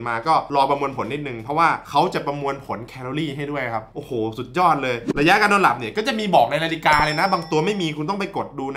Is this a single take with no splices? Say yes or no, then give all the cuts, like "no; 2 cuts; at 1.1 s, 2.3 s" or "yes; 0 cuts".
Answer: no; 1 cut; at 5.1 s